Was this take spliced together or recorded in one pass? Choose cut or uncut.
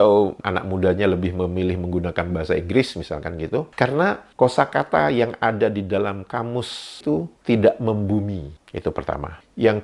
cut